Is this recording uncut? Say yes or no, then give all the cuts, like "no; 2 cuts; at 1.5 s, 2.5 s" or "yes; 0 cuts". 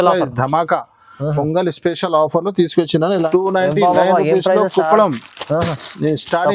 no; 1 cut; at 3.2 s